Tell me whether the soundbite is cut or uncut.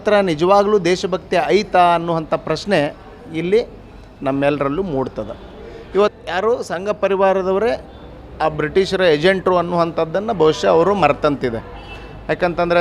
cut